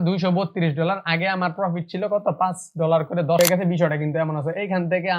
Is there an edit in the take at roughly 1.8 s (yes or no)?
no